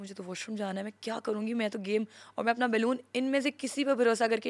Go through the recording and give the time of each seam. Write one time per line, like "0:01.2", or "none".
none